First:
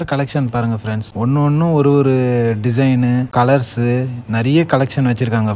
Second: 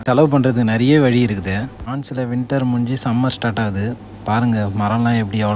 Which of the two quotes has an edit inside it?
second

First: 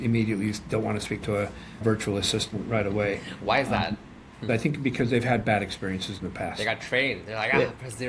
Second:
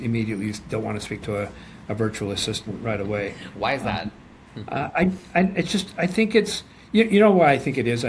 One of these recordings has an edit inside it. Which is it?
first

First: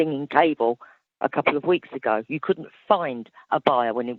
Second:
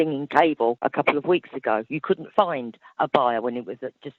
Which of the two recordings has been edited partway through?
second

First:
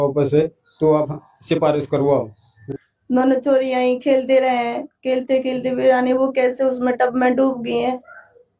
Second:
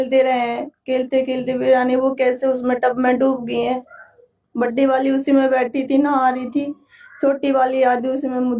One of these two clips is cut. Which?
first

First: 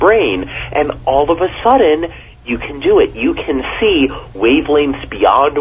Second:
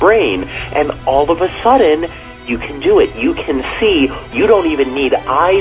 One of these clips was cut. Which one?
second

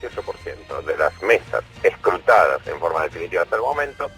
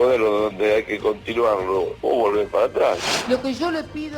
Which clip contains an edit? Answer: second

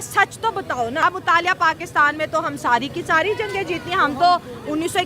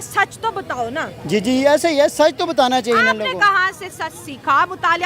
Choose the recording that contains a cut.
first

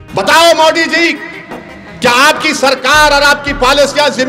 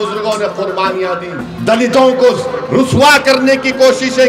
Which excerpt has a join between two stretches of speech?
second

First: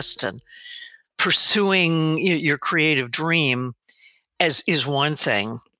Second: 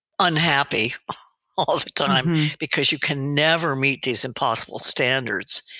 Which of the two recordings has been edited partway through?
first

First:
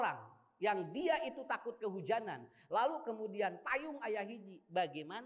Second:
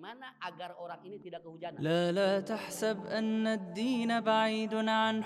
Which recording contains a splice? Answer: second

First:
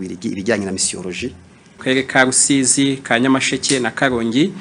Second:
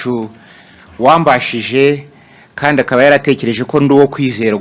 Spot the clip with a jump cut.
first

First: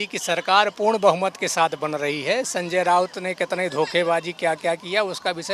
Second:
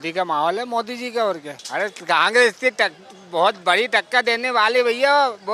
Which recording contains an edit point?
second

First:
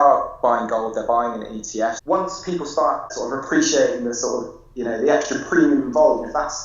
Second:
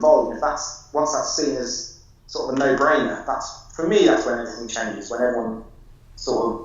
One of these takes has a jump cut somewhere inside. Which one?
first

